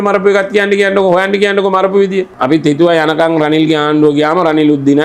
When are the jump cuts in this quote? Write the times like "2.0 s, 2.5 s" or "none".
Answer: 2.3 s

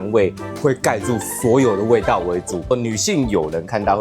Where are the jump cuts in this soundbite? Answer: 2.7 s

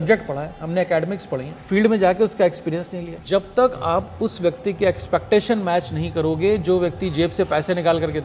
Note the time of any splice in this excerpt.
1.5 s, 3.2 s

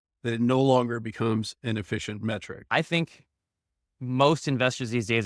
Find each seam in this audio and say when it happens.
2.6 s

